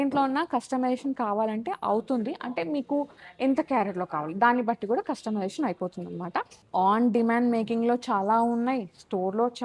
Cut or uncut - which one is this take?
cut